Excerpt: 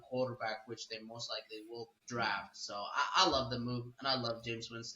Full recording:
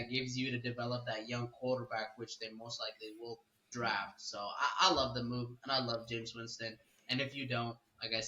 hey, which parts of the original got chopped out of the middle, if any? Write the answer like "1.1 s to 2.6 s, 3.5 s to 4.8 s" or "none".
3.5 s to 3.6 s